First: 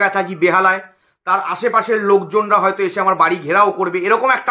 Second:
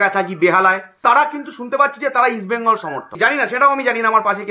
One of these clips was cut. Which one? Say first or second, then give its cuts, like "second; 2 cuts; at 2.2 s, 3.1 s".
second; 2 cuts; at 1.0 s, 3.0 s